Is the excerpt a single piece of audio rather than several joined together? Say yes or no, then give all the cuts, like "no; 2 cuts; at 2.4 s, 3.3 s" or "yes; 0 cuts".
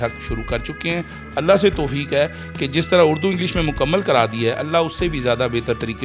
yes; 0 cuts